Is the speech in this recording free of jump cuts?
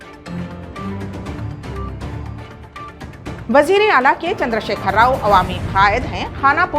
no; 1 cut; at 3.4 s

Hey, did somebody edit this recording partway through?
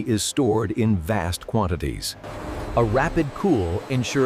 yes; 1 cut; at 2.4 s

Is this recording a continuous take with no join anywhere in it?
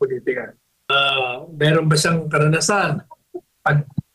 no; 1 cut; at 0.9 s

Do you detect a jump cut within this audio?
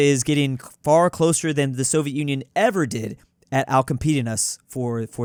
no; 0 cuts

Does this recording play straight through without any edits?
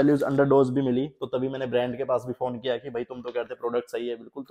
yes; 0 cuts

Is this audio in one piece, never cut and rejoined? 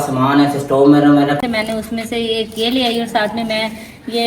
no; 1 cut; at 1.4 s

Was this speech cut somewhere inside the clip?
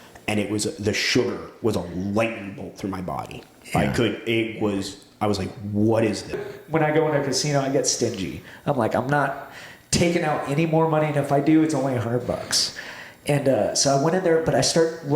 yes; 1 cut; at 6.5 s

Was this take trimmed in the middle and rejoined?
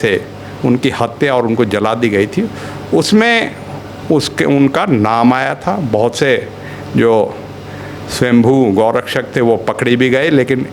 no; 0 cuts

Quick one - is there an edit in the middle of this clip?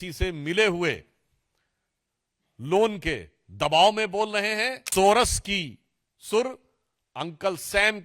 yes; 1 cut; at 4.7 s

